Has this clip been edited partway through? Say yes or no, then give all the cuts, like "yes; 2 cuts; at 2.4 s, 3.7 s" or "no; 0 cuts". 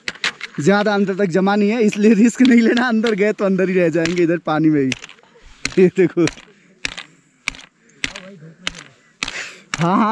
no; 0 cuts